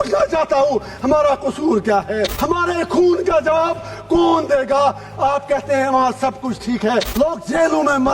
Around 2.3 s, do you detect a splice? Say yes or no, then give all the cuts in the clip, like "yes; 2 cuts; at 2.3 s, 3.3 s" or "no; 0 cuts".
yes; 2 cuts; at 2.3 s, 7.1 s